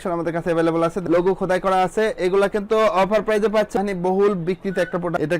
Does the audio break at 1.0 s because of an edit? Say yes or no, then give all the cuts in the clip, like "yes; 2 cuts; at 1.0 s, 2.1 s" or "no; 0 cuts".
yes; 2 cuts; at 1.0 s, 3.7 s